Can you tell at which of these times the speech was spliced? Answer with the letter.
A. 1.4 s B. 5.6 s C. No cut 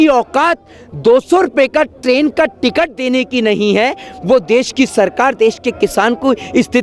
C